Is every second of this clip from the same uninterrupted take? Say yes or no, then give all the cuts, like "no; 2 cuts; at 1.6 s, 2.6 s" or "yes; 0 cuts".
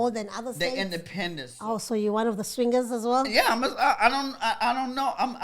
no; 1 cut; at 1.5 s